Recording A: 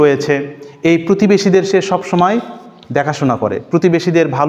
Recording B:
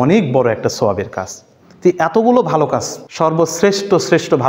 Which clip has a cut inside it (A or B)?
B